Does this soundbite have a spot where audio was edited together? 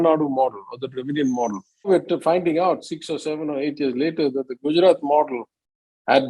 yes; 1 cut; at 1.9 s

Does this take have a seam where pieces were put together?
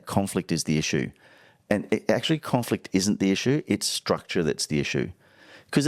no; 0 cuts

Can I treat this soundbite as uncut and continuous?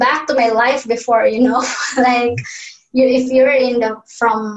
yes; 0 cuts

